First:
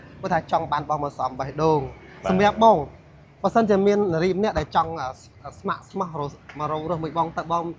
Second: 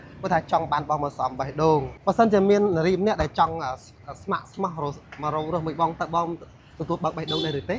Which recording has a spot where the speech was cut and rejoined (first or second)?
second